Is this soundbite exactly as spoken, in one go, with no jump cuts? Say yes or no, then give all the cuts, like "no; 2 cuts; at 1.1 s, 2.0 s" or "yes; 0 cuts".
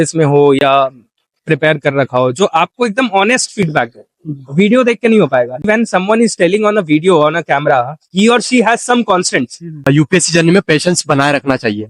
no; 2 cuts; at 5.7 s, 9.9 s